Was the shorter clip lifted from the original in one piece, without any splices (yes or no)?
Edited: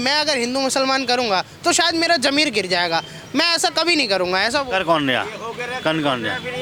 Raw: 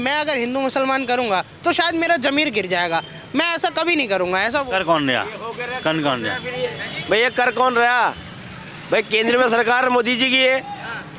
yes